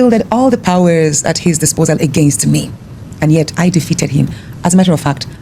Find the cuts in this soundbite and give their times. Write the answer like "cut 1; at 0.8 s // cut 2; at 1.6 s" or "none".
none